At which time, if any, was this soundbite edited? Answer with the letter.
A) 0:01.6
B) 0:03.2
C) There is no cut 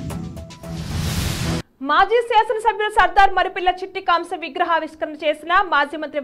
A